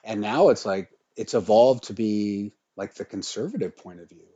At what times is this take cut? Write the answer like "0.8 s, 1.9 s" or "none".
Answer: 2.6 s